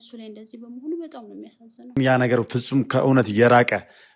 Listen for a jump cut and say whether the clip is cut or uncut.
cut